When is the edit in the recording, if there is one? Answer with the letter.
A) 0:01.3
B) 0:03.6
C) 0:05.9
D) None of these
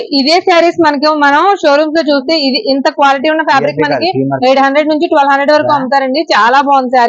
D